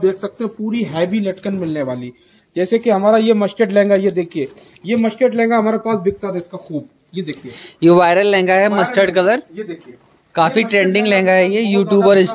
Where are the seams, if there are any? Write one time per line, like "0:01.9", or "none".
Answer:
none